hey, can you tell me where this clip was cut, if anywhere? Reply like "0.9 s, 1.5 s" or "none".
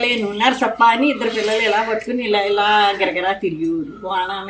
none